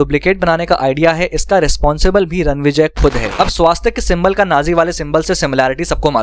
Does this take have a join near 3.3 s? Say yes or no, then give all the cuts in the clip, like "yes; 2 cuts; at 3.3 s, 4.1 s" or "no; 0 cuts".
yes; 1 cut; at 3.3 s